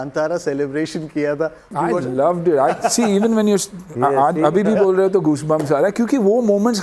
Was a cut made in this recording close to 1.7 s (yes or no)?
yes